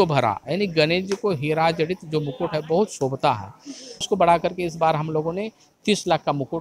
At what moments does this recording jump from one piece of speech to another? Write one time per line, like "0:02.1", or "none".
0:04.1